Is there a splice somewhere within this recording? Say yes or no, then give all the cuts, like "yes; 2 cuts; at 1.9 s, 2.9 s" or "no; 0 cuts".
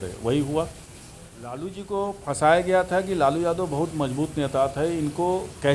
yes; 1 cut; at 1.7 s